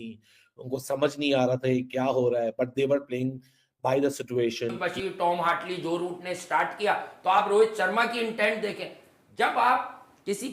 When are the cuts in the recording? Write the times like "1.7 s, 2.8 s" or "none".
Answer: 4.8 s